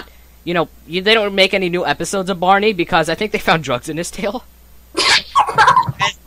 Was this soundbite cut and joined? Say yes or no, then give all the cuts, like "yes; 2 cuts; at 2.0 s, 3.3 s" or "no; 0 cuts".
no; 0 cuts